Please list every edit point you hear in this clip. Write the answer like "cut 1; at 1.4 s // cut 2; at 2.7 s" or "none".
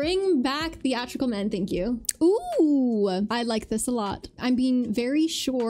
cut 1; at 2.0 s // cut 2; at 3.3 s